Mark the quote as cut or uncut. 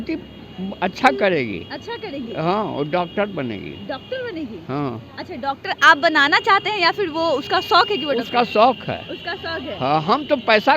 uncut